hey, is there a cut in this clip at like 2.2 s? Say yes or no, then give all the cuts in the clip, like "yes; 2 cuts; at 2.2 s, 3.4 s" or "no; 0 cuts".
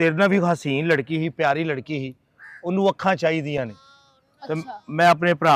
no; 0 cuts